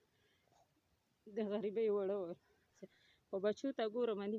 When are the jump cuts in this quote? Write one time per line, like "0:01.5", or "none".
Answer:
0:02.6